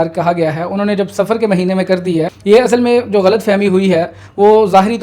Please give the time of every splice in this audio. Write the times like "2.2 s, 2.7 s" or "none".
2.4 s